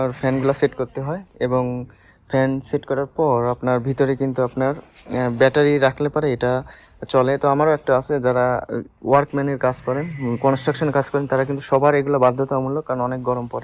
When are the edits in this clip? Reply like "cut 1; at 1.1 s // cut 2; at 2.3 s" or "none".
none